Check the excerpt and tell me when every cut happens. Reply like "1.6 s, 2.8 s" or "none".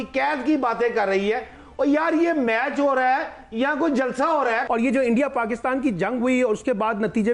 4.6 s